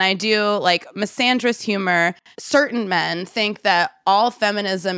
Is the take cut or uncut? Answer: uncut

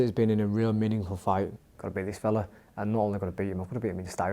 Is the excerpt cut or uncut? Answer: cut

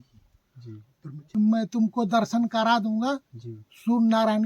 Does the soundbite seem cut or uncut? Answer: cut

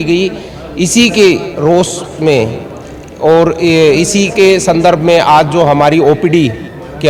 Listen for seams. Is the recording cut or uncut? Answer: uncut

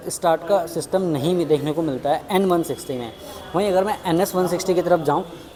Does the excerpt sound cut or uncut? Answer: uncut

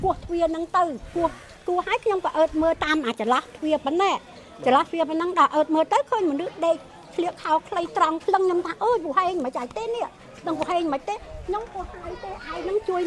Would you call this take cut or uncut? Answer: uncut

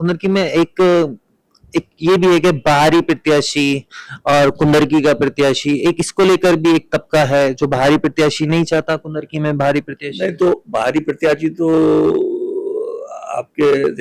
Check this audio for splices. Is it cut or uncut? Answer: uncut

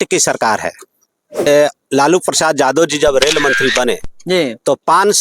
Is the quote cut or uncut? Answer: cut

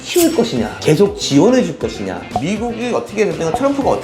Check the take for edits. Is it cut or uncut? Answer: cut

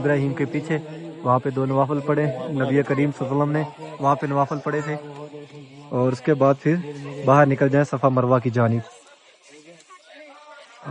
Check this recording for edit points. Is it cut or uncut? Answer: uncut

